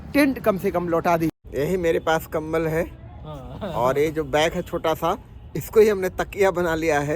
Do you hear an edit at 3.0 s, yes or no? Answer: no